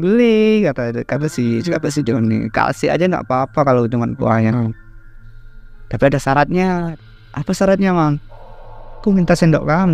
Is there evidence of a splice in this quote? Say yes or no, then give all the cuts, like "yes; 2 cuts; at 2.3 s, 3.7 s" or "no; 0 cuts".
yes; 1 cut; at 7.0 s